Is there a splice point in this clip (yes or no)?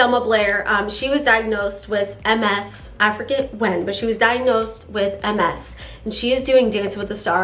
no